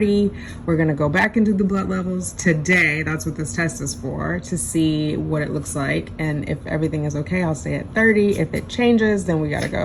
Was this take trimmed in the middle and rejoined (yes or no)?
no